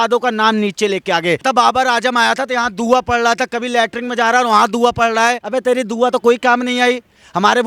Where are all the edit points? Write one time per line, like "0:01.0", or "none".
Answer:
0:01.4
0:05.4